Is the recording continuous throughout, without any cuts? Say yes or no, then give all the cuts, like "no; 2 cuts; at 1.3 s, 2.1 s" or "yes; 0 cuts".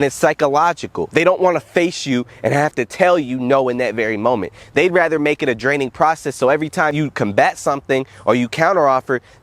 no; 2 cuts; at 1.0 s, 6.9 s